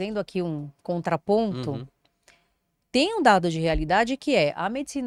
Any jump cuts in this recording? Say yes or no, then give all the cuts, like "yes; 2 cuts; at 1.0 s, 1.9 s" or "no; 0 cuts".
no; 0 cuts